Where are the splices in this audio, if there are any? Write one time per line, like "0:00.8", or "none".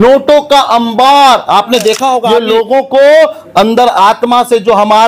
0:02.2